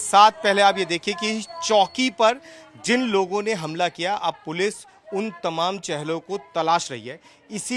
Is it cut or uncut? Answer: uncut